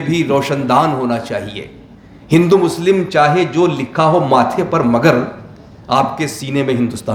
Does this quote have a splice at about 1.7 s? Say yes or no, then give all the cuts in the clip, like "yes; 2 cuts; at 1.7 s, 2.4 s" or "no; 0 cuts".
no; 0 cuts